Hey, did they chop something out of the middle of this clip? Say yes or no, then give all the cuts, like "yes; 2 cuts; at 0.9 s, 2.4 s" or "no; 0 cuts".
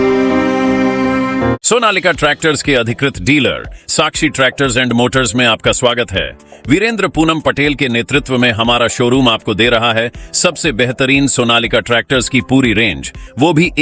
yes; 1 cut; at 1.6 s